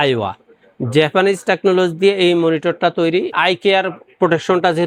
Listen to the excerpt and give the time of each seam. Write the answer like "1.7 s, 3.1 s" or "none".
none